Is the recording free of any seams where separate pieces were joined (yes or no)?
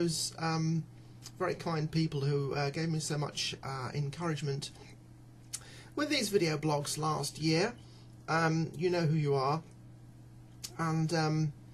no